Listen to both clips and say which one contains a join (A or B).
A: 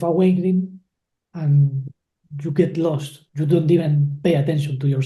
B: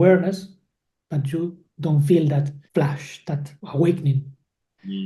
B